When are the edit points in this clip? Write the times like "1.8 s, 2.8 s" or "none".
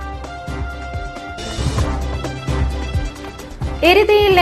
3.0 s